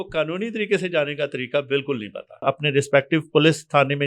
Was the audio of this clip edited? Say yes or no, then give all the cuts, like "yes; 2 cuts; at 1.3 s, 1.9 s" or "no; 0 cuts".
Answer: yes; 1 cut; at 2.4 s